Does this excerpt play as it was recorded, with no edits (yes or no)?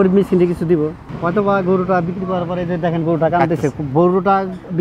no